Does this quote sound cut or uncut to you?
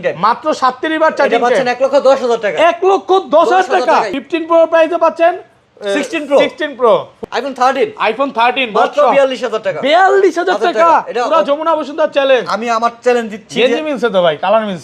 cut